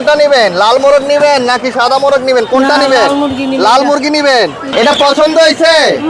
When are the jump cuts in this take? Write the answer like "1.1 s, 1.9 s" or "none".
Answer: 4.6 s